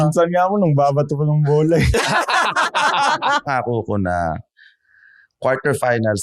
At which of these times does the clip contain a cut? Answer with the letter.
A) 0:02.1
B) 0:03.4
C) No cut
B